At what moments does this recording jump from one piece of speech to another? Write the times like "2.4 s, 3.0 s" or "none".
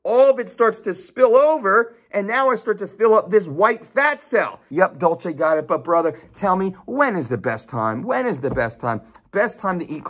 4.6 s